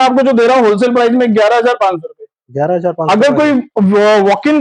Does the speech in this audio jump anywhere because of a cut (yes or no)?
no